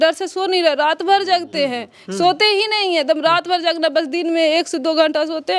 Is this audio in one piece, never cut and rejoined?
yes; 0 cuts

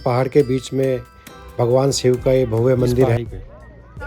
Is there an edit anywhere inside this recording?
yes; 1 cut; at 3.2 s

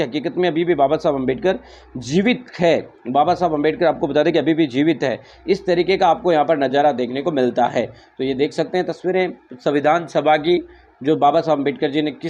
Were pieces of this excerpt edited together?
no; 0 cuts

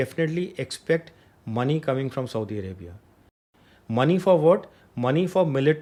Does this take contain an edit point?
no; 0 cuts

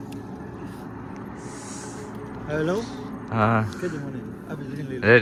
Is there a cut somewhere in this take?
no; 0 cuts

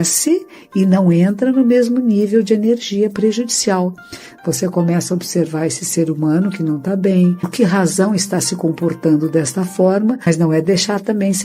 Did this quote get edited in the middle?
yes; 2 cuts; at 7.5 s, 10.3 s

